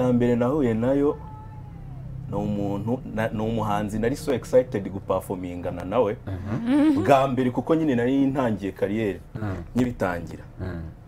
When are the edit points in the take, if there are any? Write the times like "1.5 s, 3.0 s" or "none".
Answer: none